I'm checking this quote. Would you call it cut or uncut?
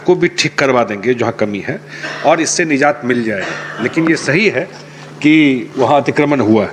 uncut